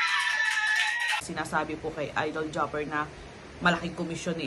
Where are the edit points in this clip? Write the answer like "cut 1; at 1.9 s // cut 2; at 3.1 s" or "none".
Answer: cut 1; at 1.3 s